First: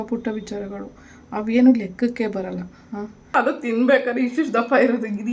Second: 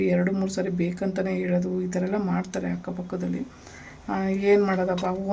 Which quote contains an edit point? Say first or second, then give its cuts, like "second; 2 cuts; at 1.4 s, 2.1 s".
first; 1 cut; at 3.3 s